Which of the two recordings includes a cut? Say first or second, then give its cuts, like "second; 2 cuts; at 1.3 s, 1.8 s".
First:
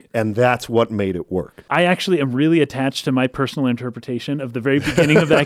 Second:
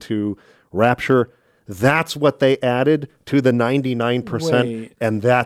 first; 1 cut; at 1.6 s